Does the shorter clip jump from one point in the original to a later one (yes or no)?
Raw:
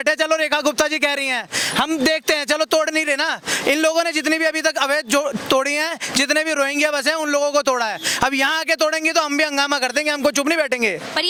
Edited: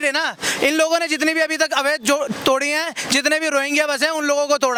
no